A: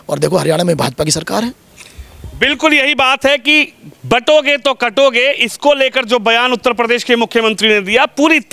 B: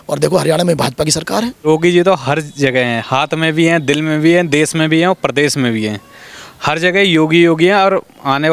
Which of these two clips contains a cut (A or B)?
B